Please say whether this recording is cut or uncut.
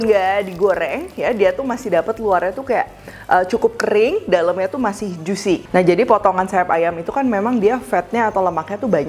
uncut